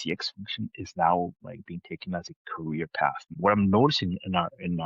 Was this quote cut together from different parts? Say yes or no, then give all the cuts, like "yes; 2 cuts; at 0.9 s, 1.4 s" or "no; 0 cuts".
yes; 1 cut; at 3.3 s